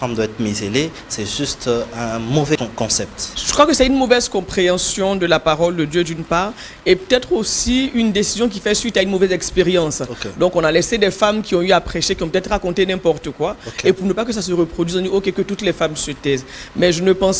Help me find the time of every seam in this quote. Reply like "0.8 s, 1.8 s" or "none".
2.8 s

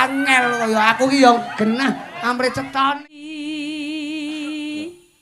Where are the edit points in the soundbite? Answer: 3.2 s

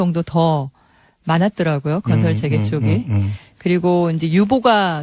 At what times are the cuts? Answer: 2.9 s

